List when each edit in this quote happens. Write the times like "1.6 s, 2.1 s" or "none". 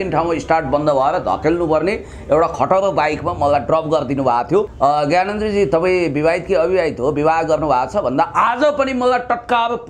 4.7 s